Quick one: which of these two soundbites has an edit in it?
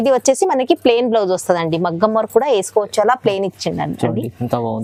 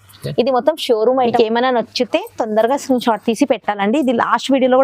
second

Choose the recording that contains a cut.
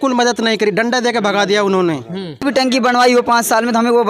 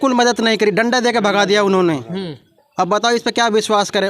first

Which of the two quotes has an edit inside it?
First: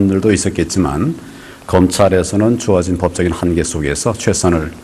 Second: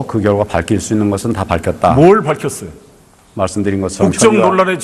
first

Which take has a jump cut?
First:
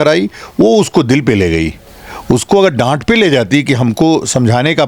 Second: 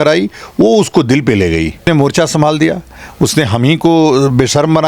second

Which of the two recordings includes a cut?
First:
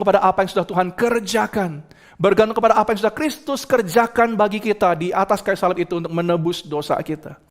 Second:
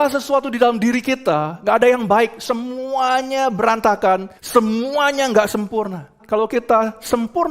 second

